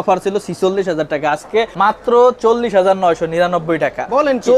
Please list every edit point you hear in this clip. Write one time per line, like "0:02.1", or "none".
0:01.7